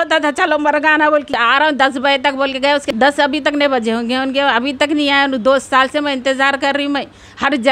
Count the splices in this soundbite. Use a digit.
2